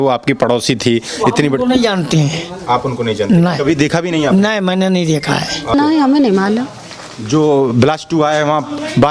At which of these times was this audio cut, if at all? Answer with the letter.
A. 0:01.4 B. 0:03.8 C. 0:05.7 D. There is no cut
C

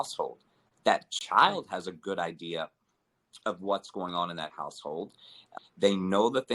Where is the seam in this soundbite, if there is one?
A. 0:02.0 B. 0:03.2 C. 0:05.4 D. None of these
C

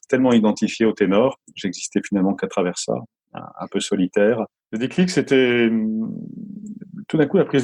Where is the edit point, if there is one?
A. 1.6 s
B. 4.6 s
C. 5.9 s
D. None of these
B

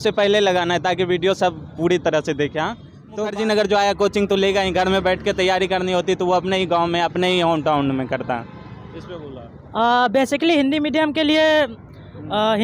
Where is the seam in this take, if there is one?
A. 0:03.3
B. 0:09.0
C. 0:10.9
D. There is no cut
A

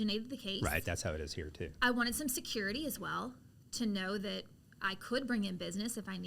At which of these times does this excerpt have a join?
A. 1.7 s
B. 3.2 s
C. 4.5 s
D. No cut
A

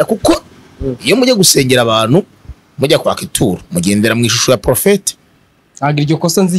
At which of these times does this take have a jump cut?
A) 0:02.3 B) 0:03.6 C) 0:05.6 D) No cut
D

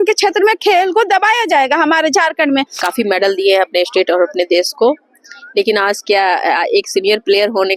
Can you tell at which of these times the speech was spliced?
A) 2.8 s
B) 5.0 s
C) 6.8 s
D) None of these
A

